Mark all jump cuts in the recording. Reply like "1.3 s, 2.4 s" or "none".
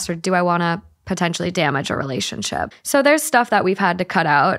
2.8 s